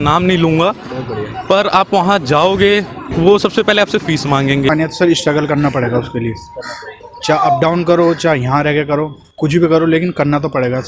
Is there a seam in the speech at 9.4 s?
no; 2 cuts; at 3.0 s, 4.7 s

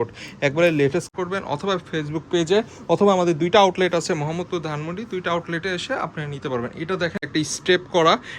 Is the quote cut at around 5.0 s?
no; 2 cuts; at 1.1 s, 7.3 s

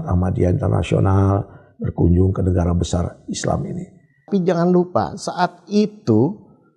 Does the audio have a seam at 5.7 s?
no; 1 cut; at 4.3 s

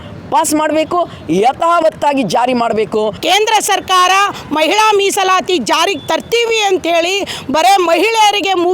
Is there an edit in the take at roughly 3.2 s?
yes; 1 cut; at 3.2 s

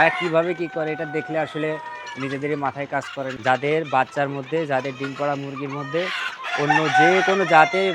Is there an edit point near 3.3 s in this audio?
yes; 1 cut; at 3.3 s

